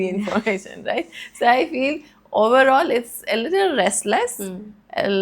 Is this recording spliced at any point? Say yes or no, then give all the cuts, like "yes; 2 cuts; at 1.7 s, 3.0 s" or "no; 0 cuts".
no; 0 cuts